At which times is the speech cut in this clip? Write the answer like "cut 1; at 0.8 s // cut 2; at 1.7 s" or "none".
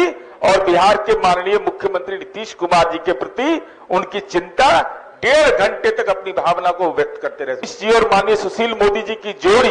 cut 1; at 7.7 s